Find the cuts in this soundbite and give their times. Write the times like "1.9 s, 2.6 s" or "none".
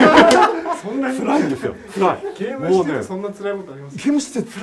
none